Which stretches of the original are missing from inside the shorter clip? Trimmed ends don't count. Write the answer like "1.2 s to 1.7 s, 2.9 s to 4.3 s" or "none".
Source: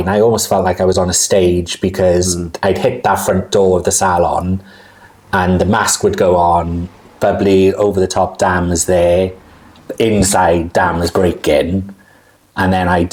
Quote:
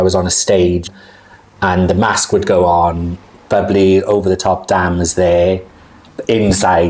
1.7 s to 4.6 s